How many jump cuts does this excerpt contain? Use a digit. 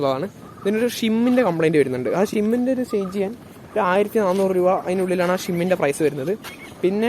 0